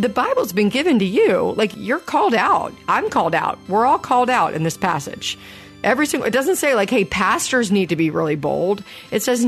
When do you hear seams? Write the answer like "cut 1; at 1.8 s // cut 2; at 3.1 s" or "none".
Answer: cut 1; at 1.7 s